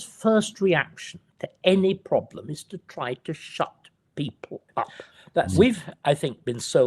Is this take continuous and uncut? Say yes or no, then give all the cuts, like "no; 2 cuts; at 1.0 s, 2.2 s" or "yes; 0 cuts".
no; 1 cut; at 5.5 s